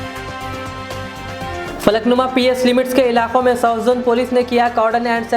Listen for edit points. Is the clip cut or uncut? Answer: cut